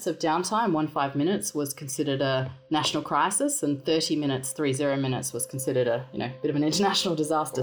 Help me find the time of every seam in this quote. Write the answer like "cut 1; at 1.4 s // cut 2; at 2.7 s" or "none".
none